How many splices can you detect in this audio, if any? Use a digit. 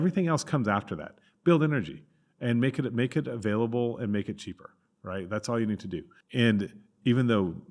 1